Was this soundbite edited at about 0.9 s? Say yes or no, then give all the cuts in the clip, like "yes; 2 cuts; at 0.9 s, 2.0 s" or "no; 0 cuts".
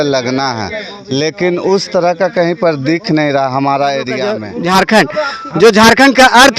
no; 1 cut; at 4.5 s